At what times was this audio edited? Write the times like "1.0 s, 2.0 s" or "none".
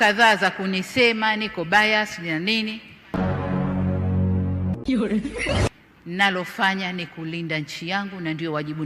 none